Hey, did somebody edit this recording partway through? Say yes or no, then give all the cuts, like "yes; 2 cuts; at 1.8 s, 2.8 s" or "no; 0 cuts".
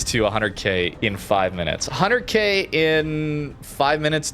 yes; 1 cut; at 0.9 s